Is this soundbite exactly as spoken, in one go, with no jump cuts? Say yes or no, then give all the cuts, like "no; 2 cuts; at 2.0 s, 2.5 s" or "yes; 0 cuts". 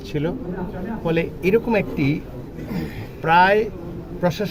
yes; 0 cuts